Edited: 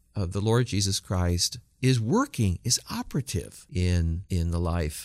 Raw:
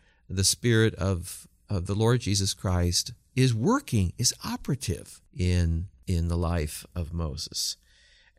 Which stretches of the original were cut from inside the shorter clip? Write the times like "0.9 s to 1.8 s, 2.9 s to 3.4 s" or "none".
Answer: 5.1 s to 5.2 s, 5.9 s to 6.0 s

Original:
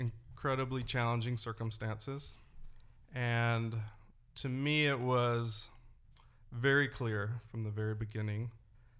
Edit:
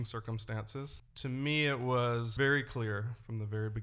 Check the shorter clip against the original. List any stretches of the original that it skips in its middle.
2.4 s to 4.2 s, 5.5 s to 6.5 s

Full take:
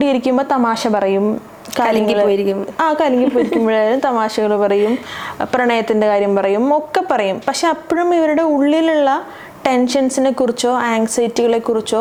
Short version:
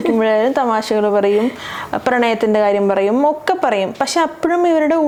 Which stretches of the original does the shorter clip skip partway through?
none

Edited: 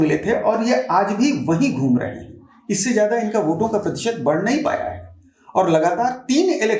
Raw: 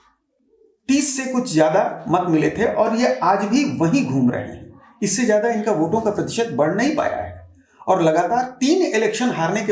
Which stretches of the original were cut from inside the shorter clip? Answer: none

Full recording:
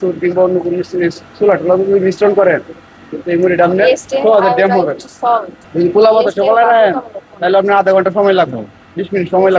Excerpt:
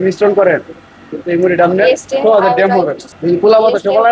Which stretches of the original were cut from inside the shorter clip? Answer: 5.1 s to 5.6 s

